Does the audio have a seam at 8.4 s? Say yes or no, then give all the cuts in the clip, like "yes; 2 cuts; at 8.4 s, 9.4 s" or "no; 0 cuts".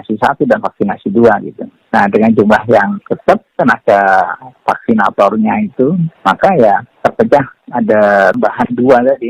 yes; 1 cut; at 8.4 s